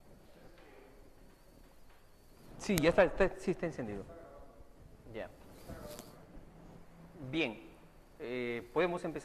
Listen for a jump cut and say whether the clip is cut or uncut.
cut